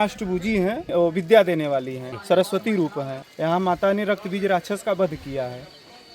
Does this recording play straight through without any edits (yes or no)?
no